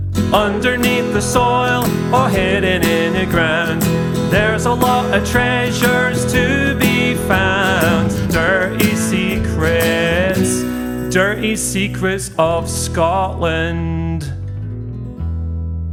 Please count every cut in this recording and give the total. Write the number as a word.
zero